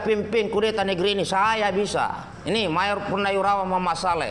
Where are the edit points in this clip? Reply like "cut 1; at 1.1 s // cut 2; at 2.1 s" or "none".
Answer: cut 1; at 2.3 s